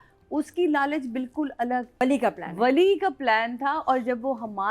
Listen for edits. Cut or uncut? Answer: cut